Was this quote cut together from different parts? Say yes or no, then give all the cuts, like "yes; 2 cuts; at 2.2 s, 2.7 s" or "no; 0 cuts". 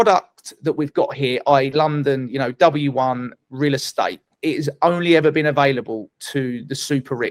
no; 0 cuts